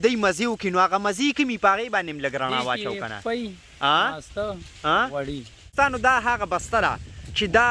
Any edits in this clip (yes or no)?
yes